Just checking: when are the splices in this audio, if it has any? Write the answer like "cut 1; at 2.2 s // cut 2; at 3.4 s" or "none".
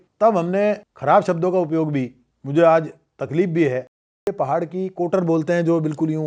cut 1; at 4.0 s